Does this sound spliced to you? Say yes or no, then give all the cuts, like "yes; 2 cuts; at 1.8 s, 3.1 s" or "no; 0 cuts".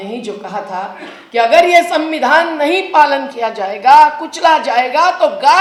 no; 0 cuts